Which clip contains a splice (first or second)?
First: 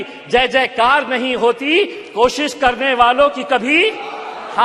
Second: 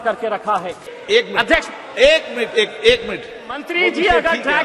second